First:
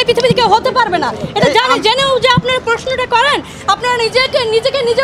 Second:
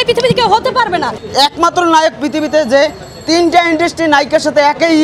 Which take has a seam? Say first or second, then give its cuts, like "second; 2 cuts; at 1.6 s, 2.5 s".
second; 1 cut; at 1.2 s